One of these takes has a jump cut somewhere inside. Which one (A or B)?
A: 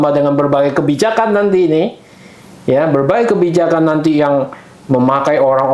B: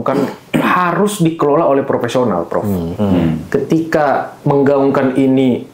B